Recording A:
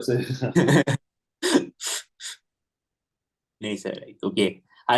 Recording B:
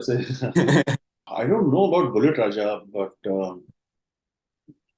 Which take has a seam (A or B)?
B